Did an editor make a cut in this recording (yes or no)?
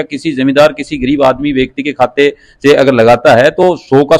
no